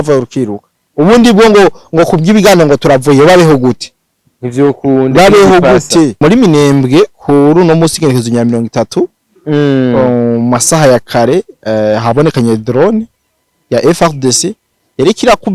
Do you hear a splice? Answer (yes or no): yes